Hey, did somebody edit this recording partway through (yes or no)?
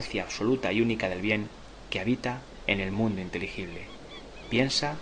no